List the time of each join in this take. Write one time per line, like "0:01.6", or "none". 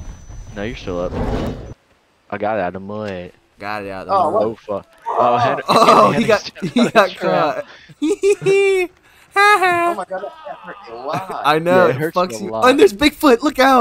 0:01.7